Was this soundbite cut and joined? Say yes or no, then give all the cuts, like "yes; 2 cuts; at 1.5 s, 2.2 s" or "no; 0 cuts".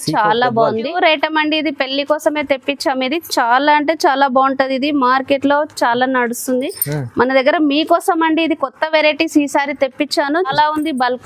yes; 2 cuts; at 0.9 s, 10.5 s